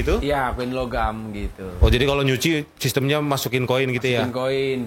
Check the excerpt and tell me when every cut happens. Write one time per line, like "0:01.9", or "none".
none